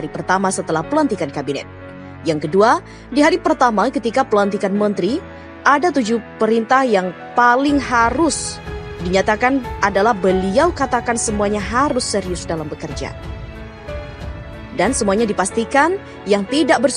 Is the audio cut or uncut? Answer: cut